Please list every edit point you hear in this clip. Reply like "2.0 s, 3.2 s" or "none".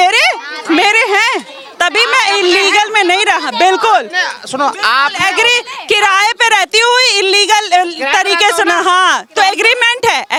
none